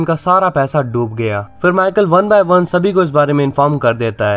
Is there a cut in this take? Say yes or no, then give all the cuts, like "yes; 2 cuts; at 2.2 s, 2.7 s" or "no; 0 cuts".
no; 0 cuts